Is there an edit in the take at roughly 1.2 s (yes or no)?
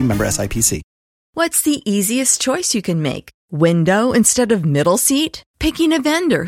yes